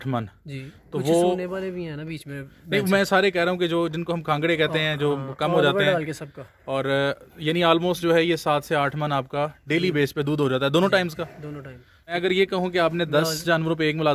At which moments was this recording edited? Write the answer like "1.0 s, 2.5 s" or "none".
12.2 s

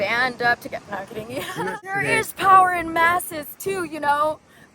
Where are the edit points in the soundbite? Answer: 1.6 s

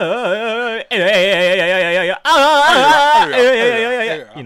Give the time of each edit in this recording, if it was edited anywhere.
none

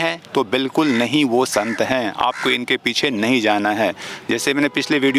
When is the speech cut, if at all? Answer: none

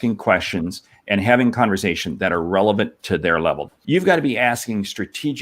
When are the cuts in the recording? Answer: 3.6 s

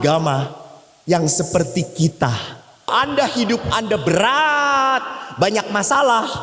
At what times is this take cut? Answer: 2.9 s

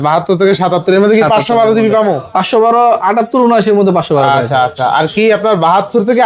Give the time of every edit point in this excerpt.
none

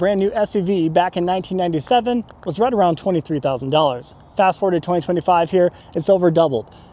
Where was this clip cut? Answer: none

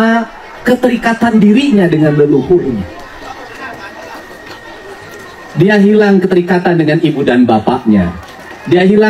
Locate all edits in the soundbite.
none

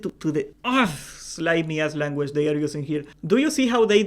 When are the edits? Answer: 3.1 s

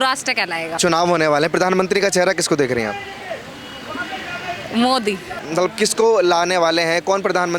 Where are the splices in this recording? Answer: 0.8 s, 5.4 s

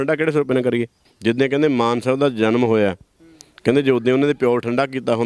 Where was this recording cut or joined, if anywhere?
1.1 s

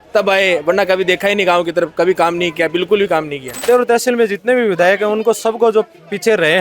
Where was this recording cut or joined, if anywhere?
3.6 s

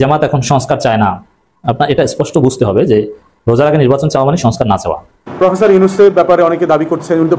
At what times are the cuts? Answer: 5.2 s

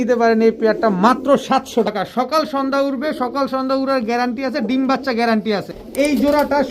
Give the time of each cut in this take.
1.9 s, 5.8 s

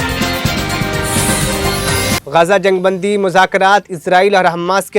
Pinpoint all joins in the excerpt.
2.2 s

